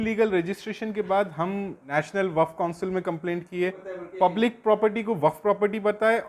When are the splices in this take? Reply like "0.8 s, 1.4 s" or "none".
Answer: 1.9 s, 3.8 s